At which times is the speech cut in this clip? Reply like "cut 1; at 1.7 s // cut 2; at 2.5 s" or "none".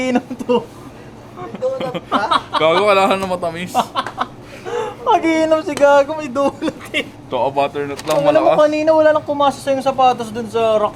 none